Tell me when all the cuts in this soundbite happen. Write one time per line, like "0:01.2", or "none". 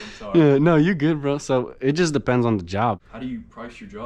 0:03.0